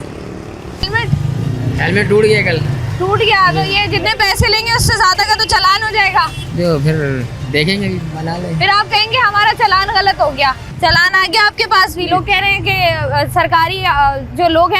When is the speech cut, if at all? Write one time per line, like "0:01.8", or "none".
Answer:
0:00.9
0:10.7